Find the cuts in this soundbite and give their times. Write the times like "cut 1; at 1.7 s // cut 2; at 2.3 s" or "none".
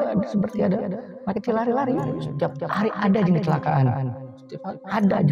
cut 1; at 2.2 s